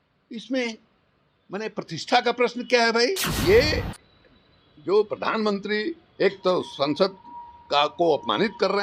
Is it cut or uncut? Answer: cut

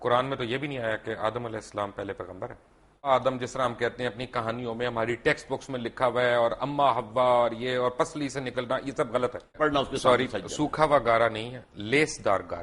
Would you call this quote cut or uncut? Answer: cut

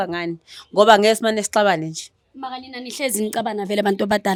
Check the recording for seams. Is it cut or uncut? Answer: uncut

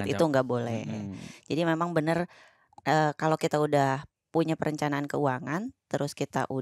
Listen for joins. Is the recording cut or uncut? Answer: uncut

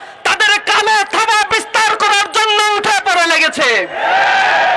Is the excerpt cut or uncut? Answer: uncut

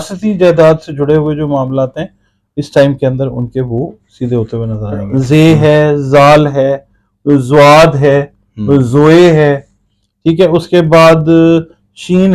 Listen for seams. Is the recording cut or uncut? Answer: cut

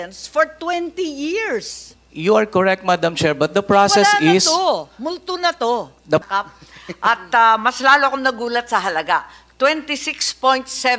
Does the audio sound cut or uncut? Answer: cut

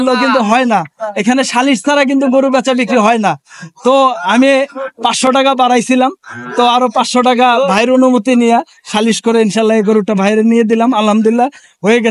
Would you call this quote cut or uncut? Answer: uncut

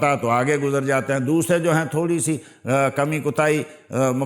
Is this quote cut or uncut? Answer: uncut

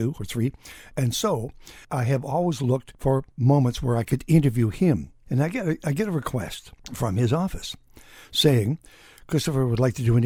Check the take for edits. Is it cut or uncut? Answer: uncut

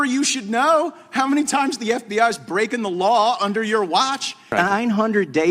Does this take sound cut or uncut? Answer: cut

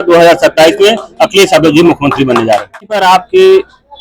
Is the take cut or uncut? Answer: cut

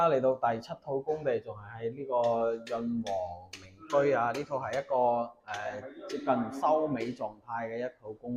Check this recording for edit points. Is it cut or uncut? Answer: uncut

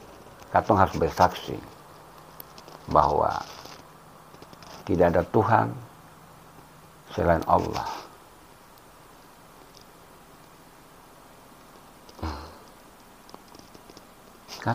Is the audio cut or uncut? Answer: uncut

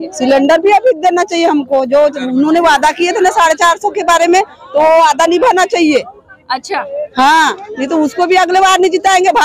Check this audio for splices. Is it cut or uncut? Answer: uncut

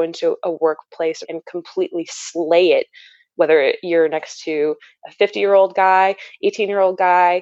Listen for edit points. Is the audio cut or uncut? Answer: cut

